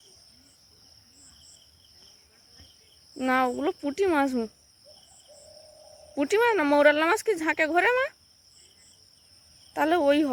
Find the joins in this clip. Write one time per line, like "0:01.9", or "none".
none

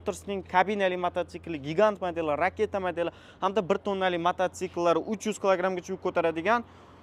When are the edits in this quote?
none

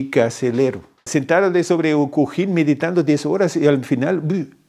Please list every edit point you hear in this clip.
0:01.1

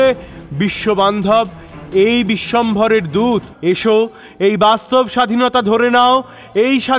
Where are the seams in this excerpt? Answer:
0:03.5

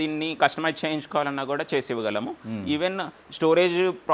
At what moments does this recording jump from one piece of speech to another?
none

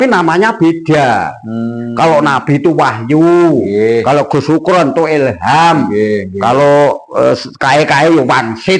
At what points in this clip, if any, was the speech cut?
none

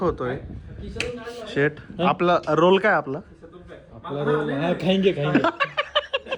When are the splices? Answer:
none

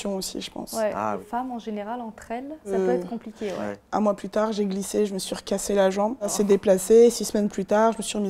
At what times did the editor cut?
0:01.2
0:02.7
0:03.8
0:06.3

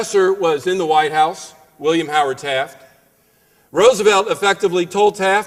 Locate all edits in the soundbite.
0:04.0

